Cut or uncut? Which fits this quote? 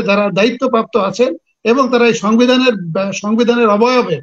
uncut